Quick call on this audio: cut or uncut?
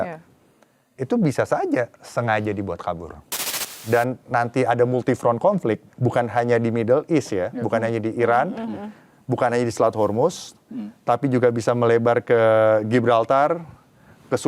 cut